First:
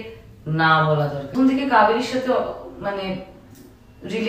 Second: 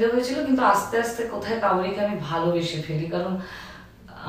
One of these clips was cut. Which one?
first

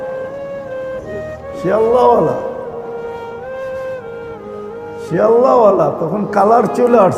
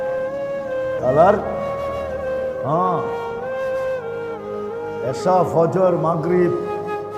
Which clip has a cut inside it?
first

